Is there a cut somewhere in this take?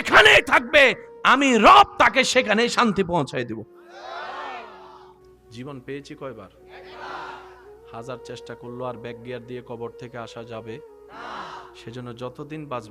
yes; 1 cut; at 5.4 s

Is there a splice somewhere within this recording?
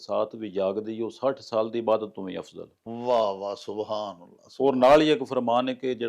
no; 0 cuts

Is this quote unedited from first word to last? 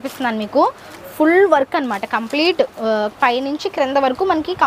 yes; 0 cuts

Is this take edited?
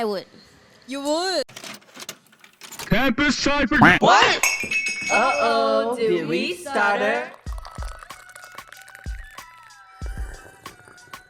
yes; 1 cut; at 1.4 s

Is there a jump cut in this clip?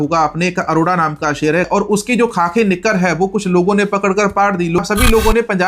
yes; 2 cuts; at 1.7 s, 4.8 s

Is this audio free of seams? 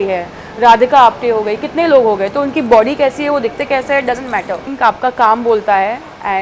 no; 1 cut; at 4.7 s

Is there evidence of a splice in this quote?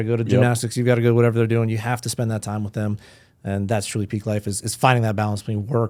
no; 0 cuts

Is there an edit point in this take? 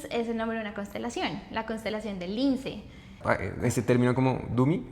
yes; 1 cut; at 3.1 s

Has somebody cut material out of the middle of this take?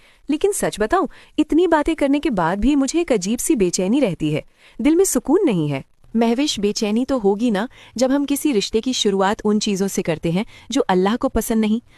yes; 1 cut; at 3.2 s

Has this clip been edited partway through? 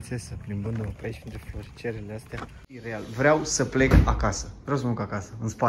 yes; 1 cut; at 3.0 s

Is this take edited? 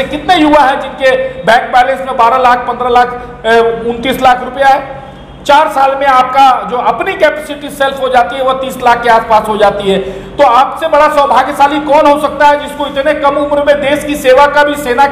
no; 0 cuts

